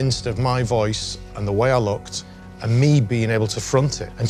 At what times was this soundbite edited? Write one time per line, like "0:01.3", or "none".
none

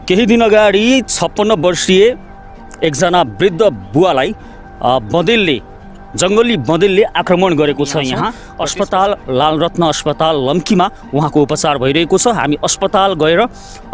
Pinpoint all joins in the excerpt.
0:08.4

